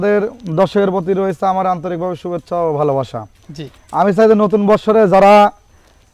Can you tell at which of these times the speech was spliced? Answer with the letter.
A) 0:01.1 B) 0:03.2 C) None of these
C